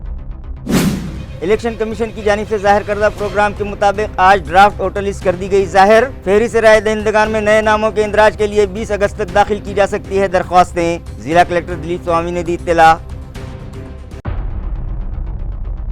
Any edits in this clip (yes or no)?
yes